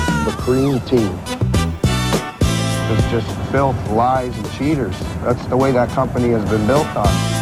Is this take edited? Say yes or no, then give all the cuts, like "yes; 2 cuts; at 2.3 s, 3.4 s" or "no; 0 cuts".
no; 0 cuts